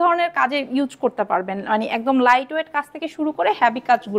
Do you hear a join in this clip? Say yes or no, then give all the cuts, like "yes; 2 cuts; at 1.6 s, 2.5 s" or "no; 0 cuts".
no; 0 cuts